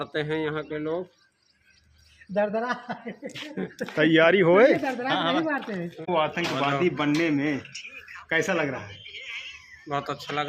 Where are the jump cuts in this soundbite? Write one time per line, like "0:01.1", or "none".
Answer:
0:06.1